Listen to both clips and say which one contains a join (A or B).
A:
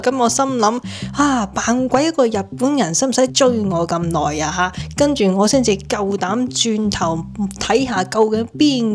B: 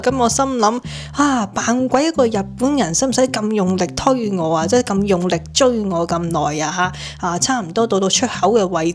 A